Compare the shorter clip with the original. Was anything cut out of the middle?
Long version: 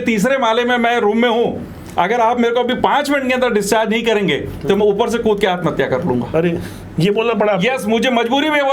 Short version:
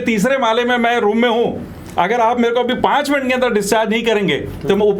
no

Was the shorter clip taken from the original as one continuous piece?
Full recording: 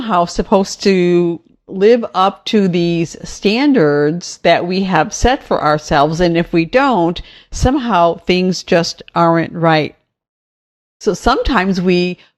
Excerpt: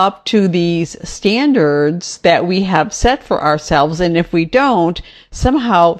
yes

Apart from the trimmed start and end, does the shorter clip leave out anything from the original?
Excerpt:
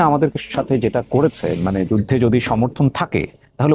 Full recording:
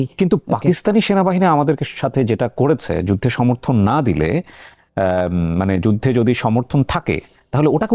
yes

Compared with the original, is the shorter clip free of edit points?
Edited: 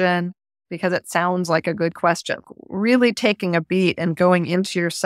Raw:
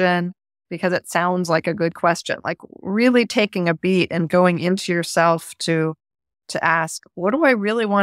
no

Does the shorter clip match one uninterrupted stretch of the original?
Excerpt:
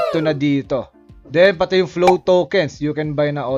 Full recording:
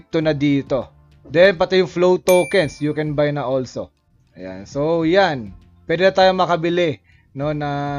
yes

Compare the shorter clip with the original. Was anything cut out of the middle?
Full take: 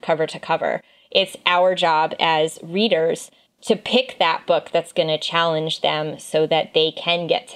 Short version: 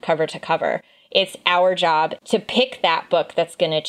yes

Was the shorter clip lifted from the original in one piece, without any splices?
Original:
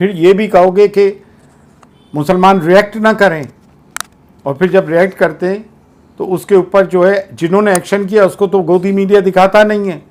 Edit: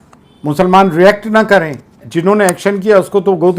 no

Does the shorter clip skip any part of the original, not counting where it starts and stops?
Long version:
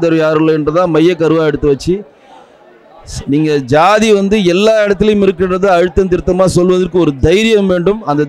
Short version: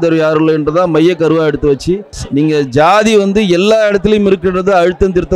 yes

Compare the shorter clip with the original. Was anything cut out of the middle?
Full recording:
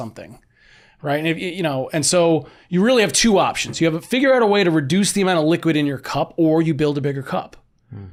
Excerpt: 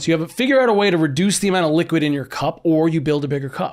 no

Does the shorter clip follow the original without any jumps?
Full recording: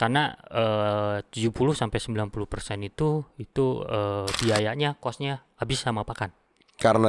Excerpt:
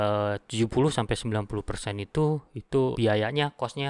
no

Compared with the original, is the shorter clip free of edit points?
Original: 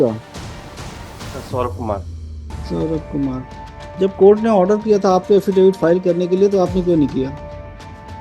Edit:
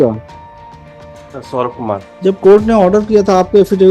no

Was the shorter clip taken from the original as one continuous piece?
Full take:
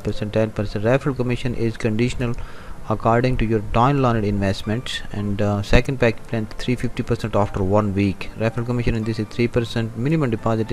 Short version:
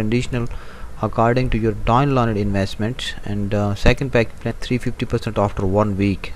no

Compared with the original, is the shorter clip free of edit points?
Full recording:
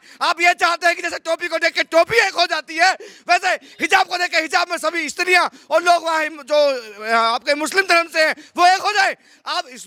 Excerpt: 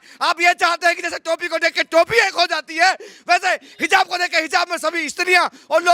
yes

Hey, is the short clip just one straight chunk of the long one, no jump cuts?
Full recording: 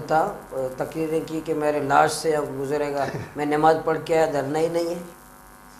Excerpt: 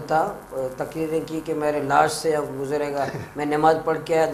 yes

